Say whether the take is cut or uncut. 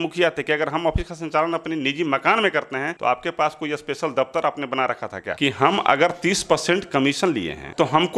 cut